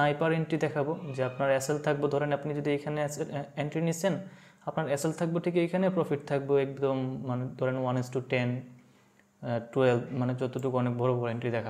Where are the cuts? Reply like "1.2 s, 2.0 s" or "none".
none